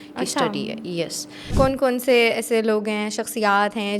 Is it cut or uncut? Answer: cut